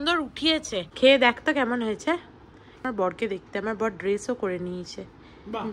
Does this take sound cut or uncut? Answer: cut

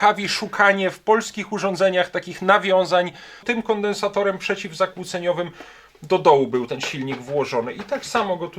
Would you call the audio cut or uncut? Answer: cut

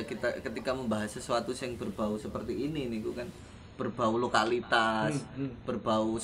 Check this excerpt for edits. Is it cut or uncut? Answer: uncut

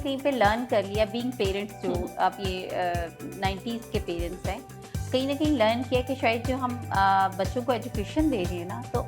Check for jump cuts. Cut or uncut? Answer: uncut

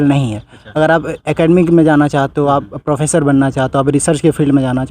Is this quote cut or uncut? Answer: uncut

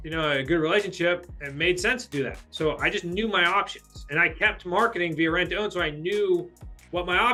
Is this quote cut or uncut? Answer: uncut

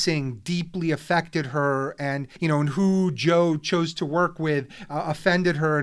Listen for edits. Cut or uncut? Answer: cut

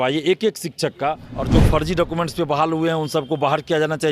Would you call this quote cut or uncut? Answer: cut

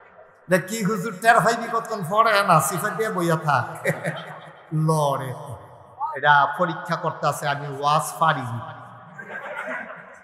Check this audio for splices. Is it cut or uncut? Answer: cut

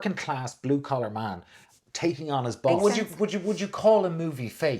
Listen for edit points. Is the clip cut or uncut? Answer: cut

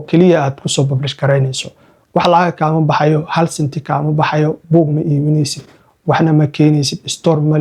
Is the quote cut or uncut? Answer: uncut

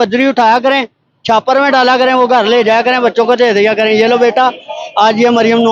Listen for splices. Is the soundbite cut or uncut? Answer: uncut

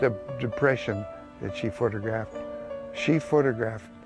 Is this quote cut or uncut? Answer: uncut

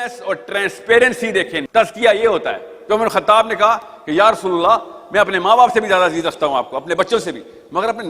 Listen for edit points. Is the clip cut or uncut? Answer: cut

